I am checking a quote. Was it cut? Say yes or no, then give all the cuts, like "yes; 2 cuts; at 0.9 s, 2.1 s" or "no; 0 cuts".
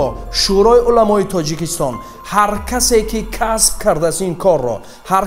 no; 0 cuts